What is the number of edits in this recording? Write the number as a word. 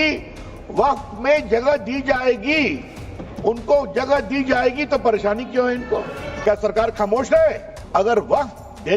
two